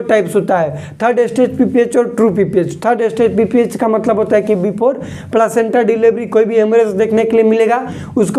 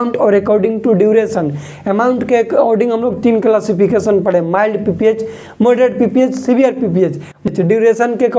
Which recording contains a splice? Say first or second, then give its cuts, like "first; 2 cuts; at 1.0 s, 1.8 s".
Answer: second; 1 cut; at 7.5 s